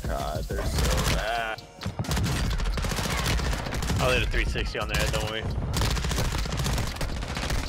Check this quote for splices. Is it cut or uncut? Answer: uncut